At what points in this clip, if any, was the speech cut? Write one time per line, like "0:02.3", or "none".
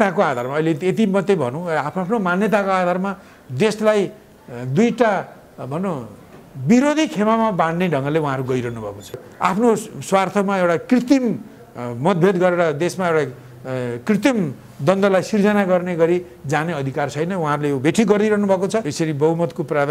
0:09.2
0:18.9